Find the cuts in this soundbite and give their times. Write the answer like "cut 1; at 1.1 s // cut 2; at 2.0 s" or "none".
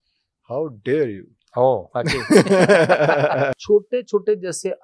cut 1; at 3.6 s